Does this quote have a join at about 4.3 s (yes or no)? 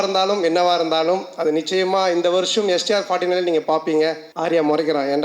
yes